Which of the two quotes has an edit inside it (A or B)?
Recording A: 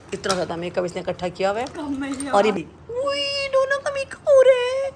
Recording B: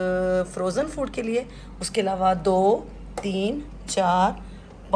A